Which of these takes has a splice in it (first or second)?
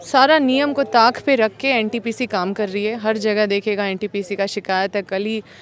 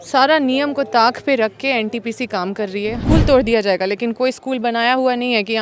second